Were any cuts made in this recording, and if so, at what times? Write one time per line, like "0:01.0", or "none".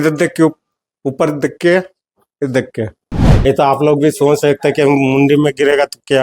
0:03.3